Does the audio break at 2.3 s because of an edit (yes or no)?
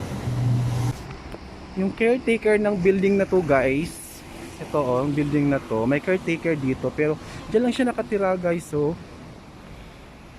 no